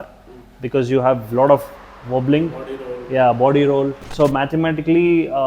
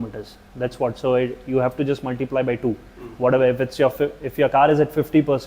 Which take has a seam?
first; 1 cut; at 4.0 s

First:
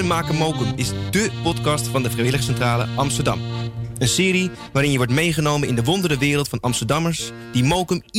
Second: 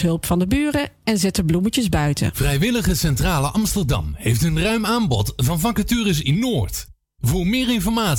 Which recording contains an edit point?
second; 1 cut; at 2.3 s

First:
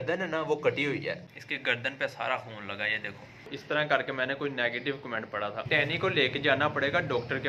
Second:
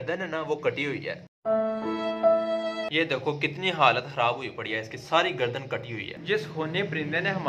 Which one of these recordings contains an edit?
first; 3 cuts; at 1.2 s, 3.5 s, 5.6 s

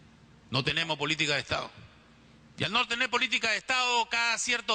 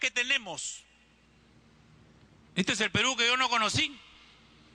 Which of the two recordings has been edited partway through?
first; 1 cut; at 1.4 s

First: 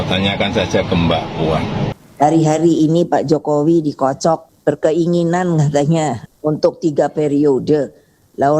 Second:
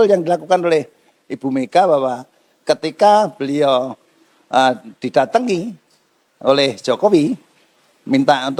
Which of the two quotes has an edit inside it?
first; 3 cuts; at 2.0 s, 4.5 s, 6.3 s

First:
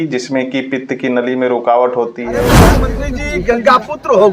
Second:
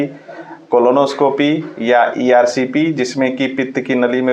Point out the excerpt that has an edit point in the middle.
first; 1 cut; at 2.8 s

